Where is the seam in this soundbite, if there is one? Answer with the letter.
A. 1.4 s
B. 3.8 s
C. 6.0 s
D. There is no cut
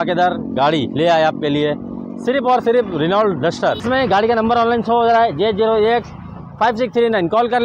B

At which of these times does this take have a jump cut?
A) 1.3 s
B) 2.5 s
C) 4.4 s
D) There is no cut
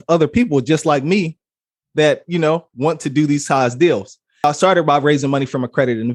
C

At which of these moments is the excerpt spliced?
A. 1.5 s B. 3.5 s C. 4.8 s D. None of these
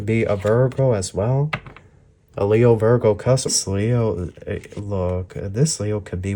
B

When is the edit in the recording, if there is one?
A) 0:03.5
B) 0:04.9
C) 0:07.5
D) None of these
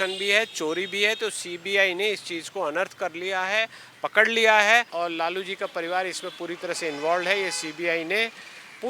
B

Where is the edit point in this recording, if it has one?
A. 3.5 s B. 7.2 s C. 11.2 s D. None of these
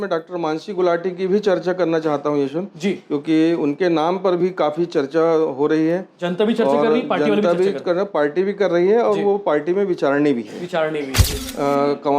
C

